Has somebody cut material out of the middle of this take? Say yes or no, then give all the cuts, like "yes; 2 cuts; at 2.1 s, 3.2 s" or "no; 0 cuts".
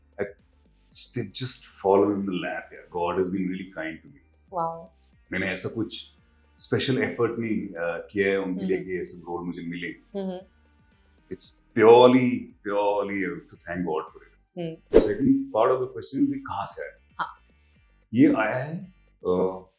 yes; 1 cut; at 15.0 s